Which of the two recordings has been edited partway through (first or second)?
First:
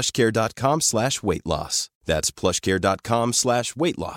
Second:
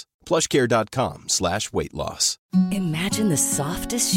second